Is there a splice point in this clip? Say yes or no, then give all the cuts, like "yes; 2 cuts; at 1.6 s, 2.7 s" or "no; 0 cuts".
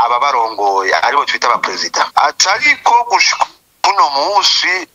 yes; 1 cut; at 2.1 s